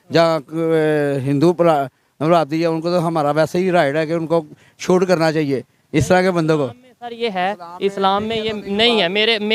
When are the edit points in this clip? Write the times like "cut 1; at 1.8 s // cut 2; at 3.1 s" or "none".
none